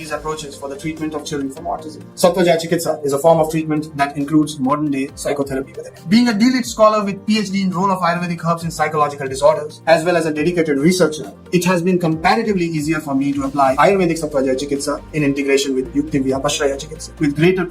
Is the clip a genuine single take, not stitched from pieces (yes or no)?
no